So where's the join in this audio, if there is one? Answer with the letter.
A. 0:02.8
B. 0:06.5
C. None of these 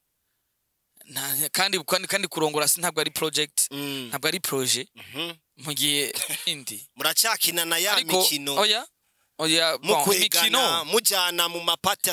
B